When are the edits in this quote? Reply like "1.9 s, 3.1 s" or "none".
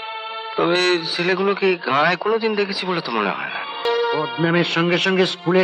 3.8 s